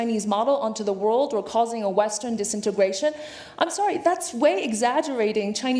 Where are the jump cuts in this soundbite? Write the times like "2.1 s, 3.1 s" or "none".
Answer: none